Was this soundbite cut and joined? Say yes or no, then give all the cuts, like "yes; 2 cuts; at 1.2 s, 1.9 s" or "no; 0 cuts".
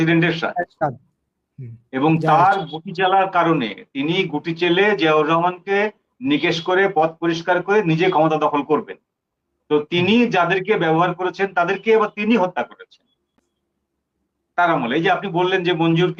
no; 0 cuts